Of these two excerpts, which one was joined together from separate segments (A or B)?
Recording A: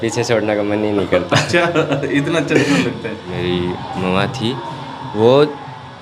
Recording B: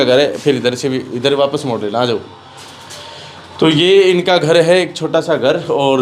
A